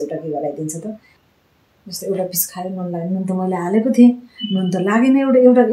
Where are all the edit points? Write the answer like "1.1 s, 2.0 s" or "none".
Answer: 1.1 s